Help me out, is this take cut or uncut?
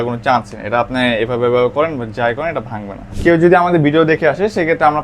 cut